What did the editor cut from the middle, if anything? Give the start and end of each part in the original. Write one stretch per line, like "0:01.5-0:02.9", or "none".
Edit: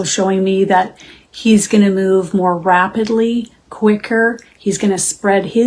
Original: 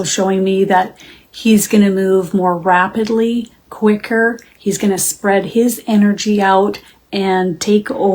none